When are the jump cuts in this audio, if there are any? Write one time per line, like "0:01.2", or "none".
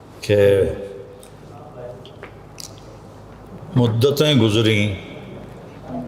none

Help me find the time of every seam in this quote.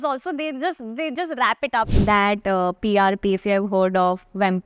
0:01.9

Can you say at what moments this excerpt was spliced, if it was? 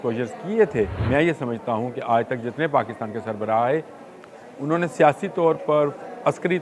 0:01.0

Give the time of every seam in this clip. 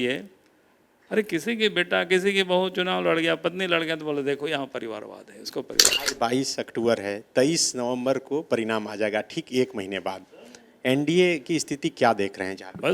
0:06.0

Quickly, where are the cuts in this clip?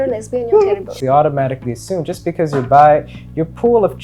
0:01.0

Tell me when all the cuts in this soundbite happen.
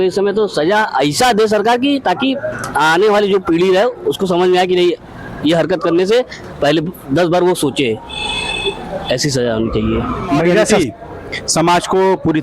0:10.7

